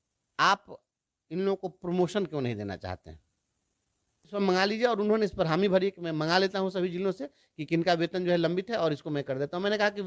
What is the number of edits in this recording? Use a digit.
1